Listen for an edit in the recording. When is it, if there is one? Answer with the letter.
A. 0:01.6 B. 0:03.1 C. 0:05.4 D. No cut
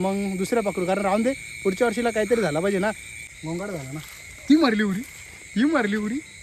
B